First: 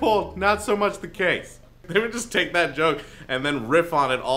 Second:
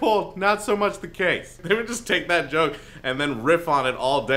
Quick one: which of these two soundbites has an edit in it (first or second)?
second